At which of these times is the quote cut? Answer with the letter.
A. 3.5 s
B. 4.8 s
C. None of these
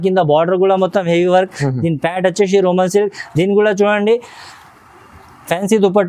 C